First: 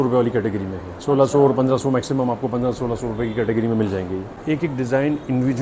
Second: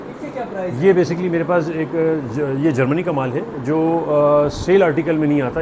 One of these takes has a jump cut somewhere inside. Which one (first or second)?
first